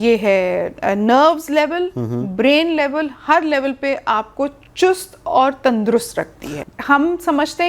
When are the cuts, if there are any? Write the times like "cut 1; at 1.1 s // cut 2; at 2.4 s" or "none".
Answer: cut 1; at 6.5 s

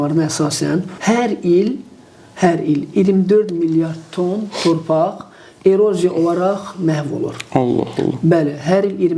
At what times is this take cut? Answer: cut 1; at 0.9 s

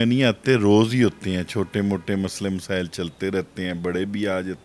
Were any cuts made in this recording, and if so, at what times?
none

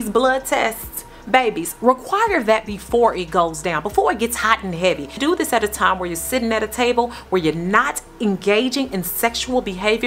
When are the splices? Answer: none

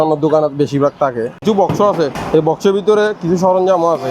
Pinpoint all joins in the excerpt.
cut 1; at 1.3 s // cut 2; at 2.2 s

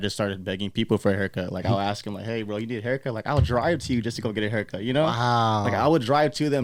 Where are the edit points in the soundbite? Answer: none

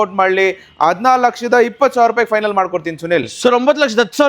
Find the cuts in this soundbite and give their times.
cut 1; at 3.3 s

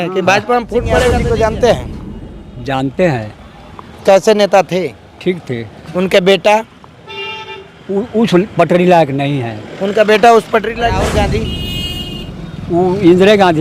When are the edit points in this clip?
cut 1; at 1.0 s // cut 2; at 11.0 s

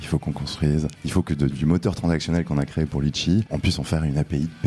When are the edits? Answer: cut 1; at 1.0 s // cut 2; at 3.5 s

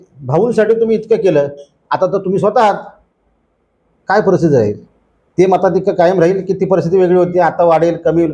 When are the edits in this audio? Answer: none

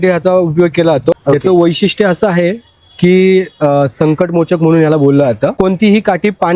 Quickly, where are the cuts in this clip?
cut 1; at 1.1 s // cut 2; at 5.5 s

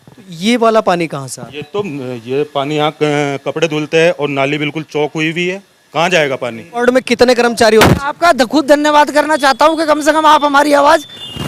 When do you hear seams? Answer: cut 1; at 6.8 s

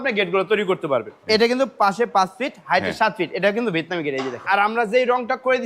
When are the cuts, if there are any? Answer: cut 1; at 1.1 s // cut 2; at 4.4 s

